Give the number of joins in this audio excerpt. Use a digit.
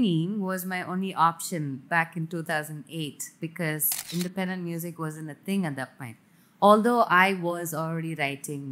0